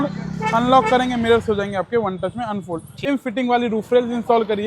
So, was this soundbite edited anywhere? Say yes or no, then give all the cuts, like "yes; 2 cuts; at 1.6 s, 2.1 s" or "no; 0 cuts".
yes; 1 cut; at 3.1 s